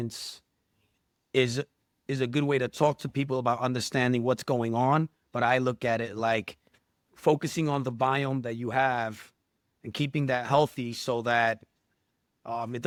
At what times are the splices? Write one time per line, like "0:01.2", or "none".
none